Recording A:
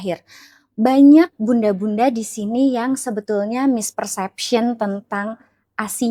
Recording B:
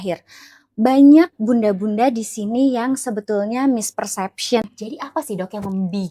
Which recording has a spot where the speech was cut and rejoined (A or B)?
B